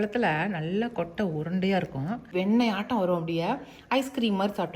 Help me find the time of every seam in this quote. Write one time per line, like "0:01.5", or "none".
0:02.3